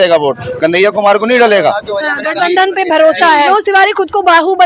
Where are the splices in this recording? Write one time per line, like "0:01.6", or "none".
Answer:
0:03.5